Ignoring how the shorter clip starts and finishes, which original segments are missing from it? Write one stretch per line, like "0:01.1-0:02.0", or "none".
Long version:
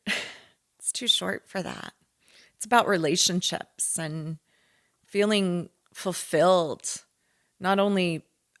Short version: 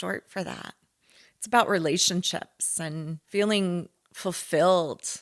0:04.4-0:05.0